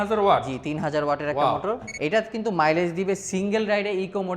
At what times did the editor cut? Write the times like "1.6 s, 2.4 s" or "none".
1.9 s

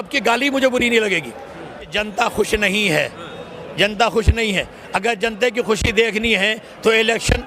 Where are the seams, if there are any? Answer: 1.9 s

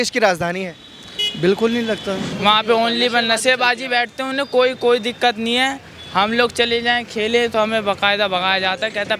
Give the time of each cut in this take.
2.3 s

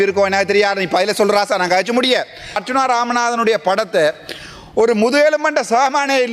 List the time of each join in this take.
2.6 s

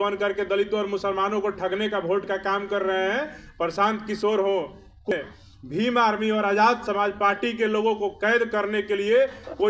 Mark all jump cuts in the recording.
5.1 s

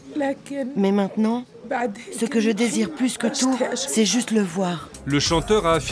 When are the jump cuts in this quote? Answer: 4.9 s

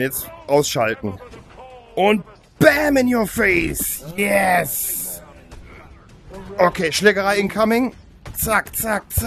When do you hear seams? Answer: none

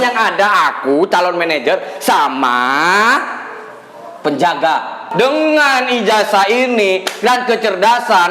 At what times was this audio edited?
5.1 s

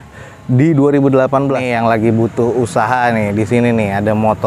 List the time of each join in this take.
1.6 s

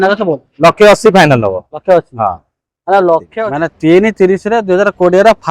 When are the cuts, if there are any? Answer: 3.3 s

